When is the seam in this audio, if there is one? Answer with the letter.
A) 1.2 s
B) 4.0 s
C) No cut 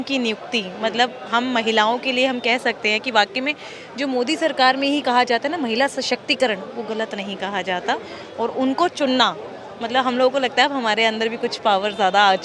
C